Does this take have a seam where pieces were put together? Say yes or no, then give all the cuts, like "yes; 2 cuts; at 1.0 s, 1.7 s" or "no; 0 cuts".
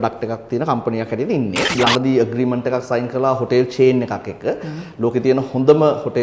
yes; 1 cut; at 1.7 s